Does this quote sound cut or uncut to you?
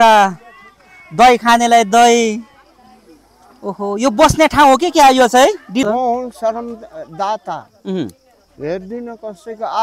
cut